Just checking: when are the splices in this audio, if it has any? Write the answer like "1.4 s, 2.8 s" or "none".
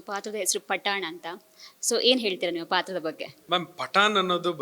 3.3 s